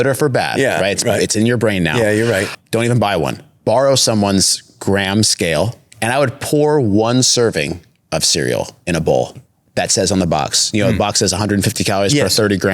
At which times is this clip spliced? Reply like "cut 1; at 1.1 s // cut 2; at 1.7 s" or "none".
cut 1; at 2.6 s // cut 2; at 5.8 s